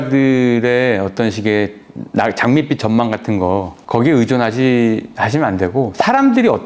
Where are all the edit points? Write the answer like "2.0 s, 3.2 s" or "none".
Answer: none